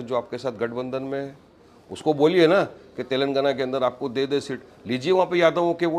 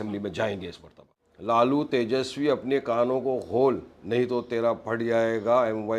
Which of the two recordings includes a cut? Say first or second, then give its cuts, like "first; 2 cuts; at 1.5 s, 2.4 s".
second; 1 cut; at 1.0 s